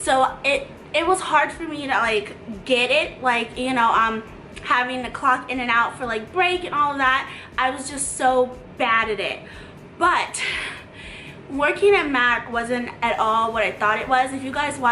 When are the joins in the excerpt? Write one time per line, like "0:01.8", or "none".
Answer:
0:08.9